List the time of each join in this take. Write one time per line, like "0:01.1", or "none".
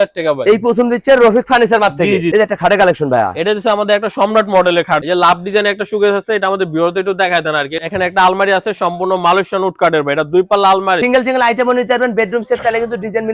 0:02.3
0:05.0
0:07.8
0:11.0

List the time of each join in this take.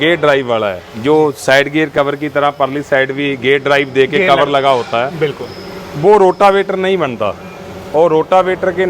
none

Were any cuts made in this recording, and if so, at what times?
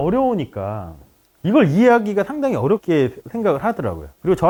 none

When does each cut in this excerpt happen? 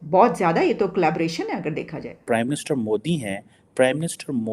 0:02.2

